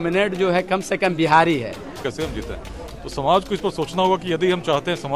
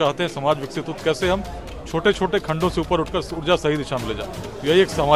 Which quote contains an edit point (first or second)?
first